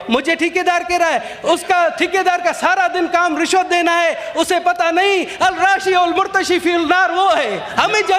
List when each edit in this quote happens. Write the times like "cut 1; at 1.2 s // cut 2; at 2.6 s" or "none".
none